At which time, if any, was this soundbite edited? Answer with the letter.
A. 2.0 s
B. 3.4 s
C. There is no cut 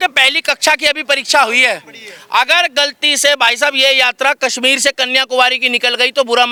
C